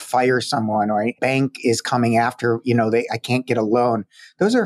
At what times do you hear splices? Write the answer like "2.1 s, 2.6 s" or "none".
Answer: 1.2 s